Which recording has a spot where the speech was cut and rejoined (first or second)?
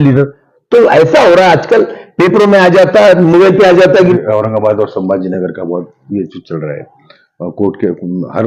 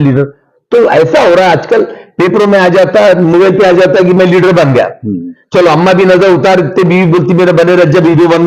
first